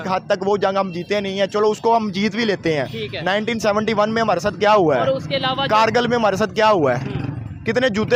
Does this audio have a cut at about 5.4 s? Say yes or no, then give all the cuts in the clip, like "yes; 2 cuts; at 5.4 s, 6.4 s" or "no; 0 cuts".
no; 0 cuts